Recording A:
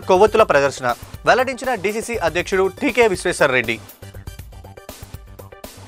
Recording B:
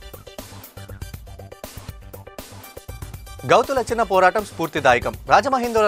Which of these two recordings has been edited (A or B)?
B